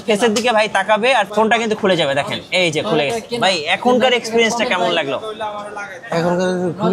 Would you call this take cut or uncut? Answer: uncut